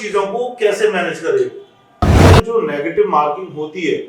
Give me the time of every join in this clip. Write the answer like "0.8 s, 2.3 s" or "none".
2.1 s